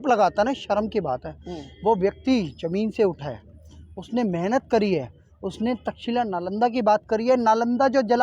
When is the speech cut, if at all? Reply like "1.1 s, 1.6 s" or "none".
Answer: none